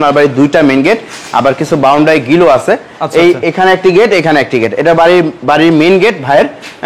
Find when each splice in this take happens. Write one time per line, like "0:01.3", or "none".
none